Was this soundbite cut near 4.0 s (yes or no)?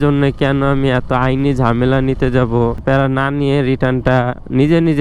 no